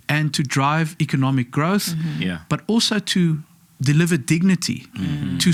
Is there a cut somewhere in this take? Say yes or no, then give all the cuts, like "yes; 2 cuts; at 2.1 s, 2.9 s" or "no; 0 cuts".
no; 0 cuts